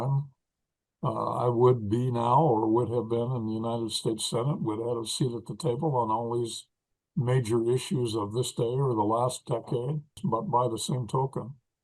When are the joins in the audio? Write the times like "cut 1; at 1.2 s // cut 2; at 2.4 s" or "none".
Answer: cut 1; at 10.1 s